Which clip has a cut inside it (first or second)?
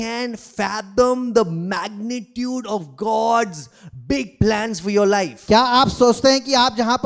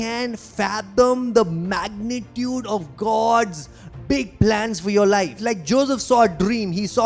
second